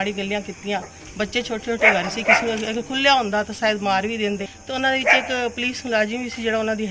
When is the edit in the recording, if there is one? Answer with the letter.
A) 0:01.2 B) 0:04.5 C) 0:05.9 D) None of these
B